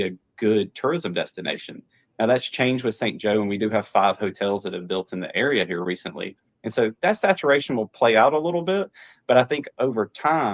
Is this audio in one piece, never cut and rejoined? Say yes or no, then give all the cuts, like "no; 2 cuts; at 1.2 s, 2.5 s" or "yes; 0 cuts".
yes; 0 cuts